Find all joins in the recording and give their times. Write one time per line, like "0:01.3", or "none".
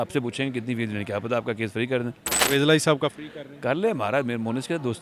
0:02.3